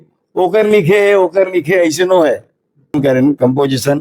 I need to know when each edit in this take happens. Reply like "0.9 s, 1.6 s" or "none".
2.9 s